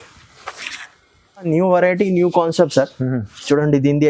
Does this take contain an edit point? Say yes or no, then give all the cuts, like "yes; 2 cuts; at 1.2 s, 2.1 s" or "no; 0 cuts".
yes; 1 cut; at 1.4 s